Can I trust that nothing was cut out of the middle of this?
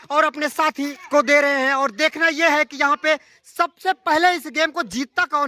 no; 1 cut; at 1.0 s

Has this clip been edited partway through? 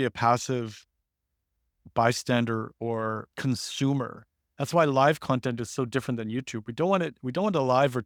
no; 0 cuts

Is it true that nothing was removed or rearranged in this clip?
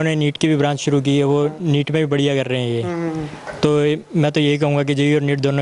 yes; 0 cuts

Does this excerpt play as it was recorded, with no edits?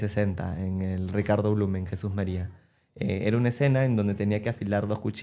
yes; 0 cuts

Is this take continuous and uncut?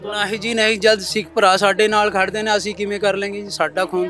yes; 0 cuts

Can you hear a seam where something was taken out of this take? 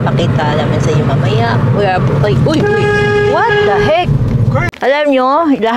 yes; 1 cut; at 4.7 s

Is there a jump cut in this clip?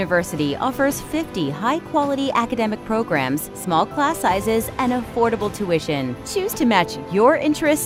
no; 0 cuts

